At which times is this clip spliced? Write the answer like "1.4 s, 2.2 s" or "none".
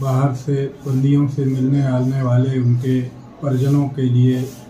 3.7 s